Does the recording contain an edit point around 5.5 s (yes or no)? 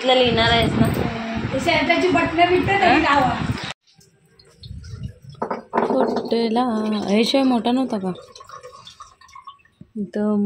no